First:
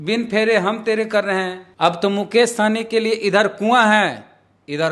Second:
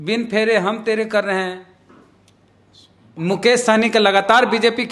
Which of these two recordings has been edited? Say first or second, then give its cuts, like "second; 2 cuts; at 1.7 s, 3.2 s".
first; 1 cut; at 1.6 s